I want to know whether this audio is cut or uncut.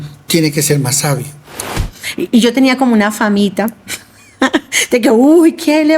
cut